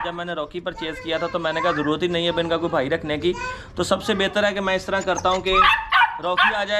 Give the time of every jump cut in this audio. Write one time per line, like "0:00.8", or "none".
none